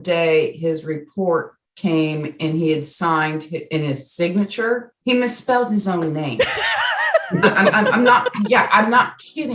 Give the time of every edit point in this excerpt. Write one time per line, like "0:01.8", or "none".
0:04.9